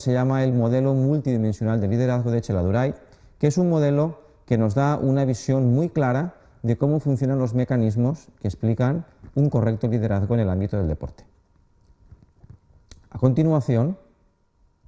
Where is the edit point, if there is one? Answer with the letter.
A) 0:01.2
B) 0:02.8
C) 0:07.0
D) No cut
C